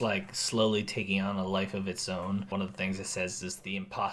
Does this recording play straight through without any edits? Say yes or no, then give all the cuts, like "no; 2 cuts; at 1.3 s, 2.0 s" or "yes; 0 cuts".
no; 1 cut; at 2.5 s